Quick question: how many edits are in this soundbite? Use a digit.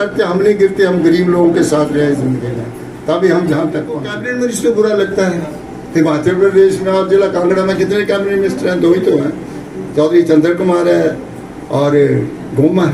1